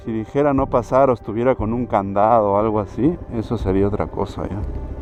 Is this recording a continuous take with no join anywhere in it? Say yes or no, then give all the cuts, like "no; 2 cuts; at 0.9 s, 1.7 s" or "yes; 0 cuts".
yes; 0 cuts